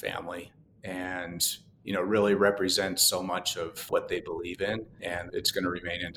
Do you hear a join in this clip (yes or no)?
yes